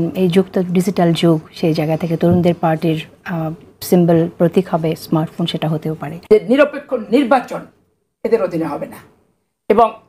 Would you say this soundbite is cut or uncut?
cut